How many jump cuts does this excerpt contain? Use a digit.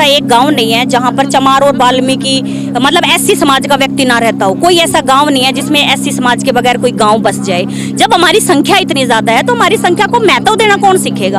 0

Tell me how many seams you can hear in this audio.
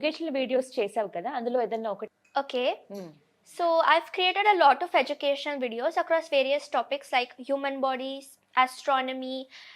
1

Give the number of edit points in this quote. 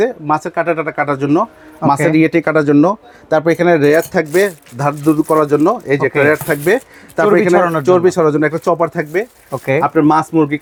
0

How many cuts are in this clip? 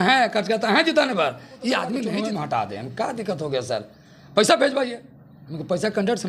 1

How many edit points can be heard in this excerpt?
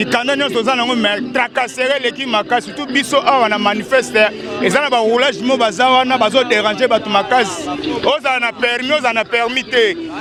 0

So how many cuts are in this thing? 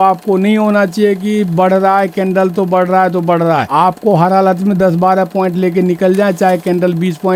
0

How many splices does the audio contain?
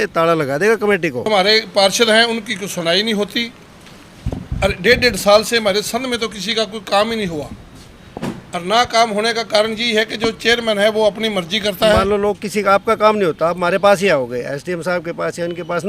2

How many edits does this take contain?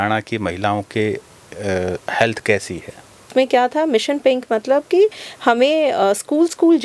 1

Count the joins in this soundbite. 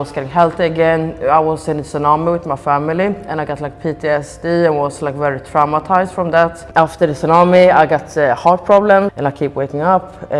2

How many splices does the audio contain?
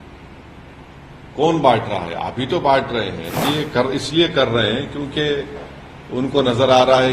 1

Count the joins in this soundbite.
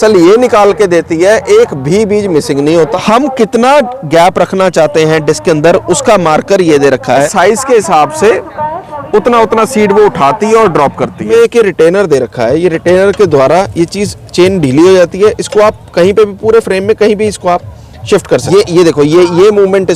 4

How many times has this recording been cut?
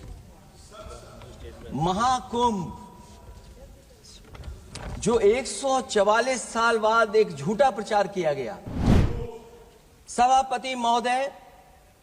1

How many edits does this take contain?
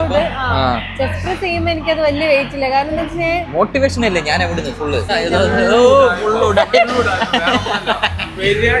1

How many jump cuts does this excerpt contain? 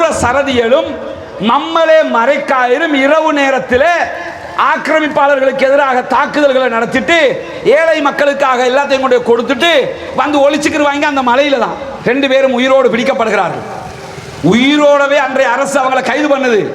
1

